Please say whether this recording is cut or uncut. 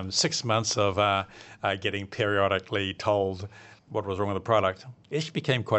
uncut